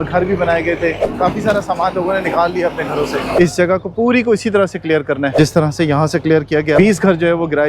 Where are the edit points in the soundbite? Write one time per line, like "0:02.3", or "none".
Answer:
0:01.1
0:03.3
0:05.3
0:06.8